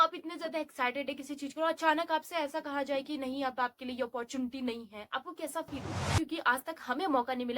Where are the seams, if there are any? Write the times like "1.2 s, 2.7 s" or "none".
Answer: 6.2 s